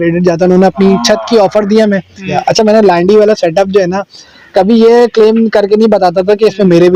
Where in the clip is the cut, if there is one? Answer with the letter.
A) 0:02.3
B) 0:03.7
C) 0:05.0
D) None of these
A